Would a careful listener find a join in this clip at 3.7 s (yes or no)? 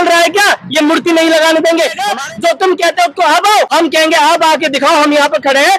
yes